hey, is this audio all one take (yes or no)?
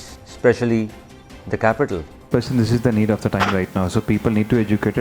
no